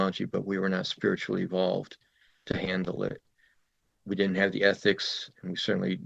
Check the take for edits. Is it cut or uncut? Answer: uncut